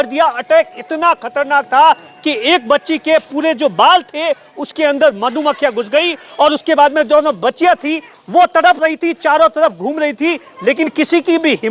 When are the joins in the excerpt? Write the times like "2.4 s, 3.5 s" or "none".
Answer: none